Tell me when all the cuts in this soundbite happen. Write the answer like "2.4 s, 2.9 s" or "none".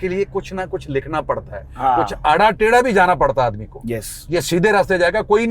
none